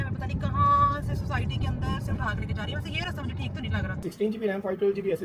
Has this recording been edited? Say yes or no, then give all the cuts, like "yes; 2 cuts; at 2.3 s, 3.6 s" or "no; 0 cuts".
yes; 1 cut; at 4.0 s